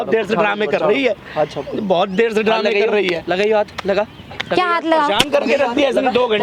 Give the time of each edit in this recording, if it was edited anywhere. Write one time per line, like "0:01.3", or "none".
none